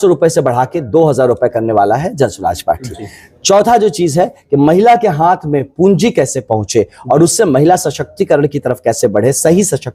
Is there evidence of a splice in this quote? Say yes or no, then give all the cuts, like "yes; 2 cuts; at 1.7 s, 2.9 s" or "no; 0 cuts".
no; 0 cuts